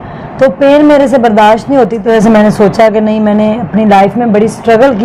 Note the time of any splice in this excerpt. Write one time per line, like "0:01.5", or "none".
0:02.0